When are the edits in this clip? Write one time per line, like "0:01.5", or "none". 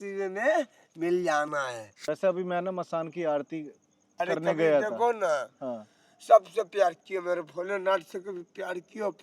0:01.9